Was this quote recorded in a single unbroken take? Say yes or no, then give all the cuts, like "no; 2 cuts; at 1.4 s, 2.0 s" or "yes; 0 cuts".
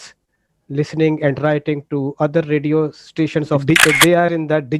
no; 1 cut; at 3.6 s